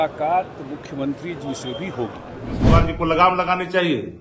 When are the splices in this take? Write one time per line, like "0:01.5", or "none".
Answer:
0:02.6